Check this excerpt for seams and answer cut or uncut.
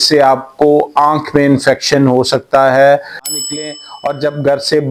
cut